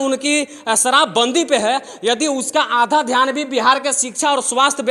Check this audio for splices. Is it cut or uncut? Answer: uncut